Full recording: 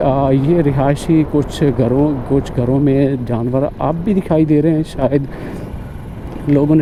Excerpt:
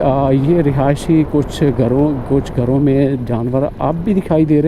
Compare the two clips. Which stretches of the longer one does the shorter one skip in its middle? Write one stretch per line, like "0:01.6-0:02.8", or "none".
none